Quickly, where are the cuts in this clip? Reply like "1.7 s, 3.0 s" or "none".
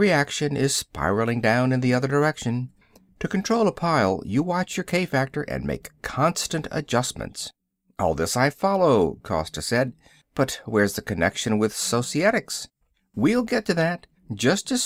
none